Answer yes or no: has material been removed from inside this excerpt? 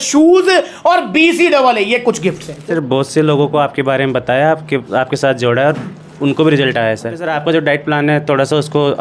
yes